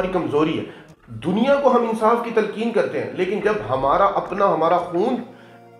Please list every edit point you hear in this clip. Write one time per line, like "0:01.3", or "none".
none